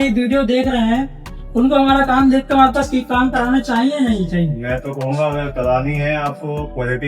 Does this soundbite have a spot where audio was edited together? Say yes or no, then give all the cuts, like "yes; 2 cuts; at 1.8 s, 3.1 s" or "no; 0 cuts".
no; 0 cuts